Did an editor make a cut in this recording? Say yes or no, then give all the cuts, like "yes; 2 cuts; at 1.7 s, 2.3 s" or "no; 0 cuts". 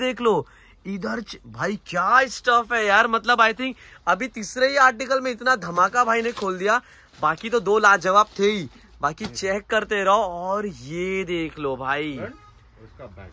no; 0 cuts